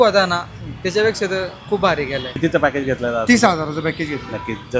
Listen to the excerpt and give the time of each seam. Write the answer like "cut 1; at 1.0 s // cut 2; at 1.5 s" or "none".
none

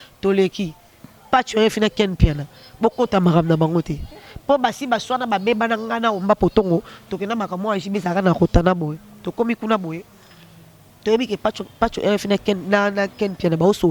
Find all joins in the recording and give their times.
cut 1; at 1.0 s

